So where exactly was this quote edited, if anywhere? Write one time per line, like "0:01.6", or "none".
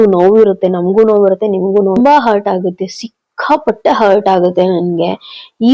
0:02.0